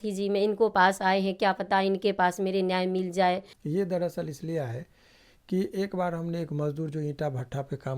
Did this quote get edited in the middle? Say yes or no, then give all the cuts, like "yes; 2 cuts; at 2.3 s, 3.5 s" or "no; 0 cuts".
yes; 1 cut; at 3.5 s